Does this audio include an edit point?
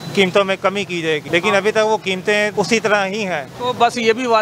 yes; 3 cuts; at 1.2 s, 2.5 s, 3.5 s

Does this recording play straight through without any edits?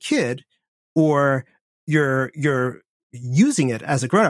yes; 0 cuts

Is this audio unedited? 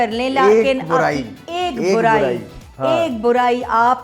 yes; 0 cuts

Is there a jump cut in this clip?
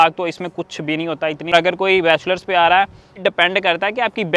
yes; 2 cuts; at 1.5 s, 3.2 s

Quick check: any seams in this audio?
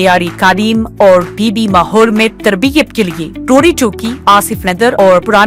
no; 0 cuts

